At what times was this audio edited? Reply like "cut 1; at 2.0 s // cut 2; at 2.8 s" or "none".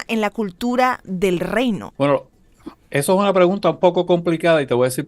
cut 1; at 1.9 s